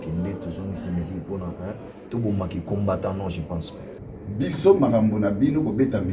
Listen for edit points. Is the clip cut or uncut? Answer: cut